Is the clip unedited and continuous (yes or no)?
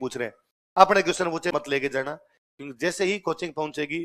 no